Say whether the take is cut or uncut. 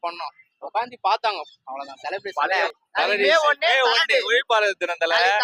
cut